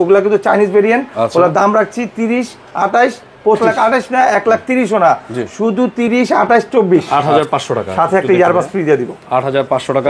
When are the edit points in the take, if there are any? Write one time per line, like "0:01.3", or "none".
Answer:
0:03.6
0:07.2